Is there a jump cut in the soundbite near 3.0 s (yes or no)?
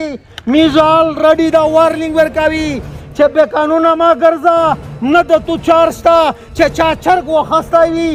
no